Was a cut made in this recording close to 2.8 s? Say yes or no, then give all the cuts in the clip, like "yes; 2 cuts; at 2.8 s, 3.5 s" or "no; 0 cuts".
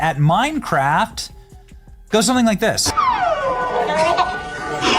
yes; 1 cut; at 2.8 s